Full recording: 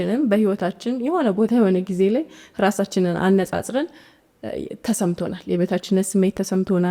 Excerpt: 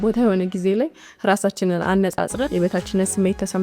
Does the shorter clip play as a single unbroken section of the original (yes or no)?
no